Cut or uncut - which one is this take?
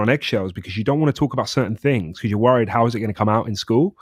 uncut